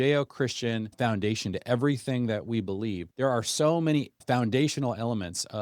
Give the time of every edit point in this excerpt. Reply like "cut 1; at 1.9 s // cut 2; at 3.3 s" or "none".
cut 1; at 0.9 s // cut 2; at 3.1 s // cut 3; at 4.2 s